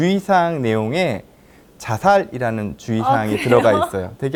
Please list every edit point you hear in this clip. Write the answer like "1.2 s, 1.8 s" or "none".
none